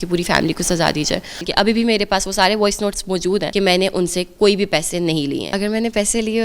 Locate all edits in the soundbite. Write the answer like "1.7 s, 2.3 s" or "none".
1.4 s, 3.5 s, 5.5 s